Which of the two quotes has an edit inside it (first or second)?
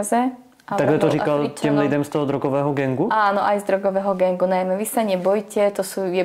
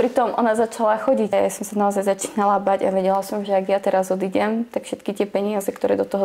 second